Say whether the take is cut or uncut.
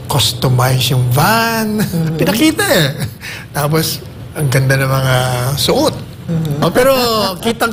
cut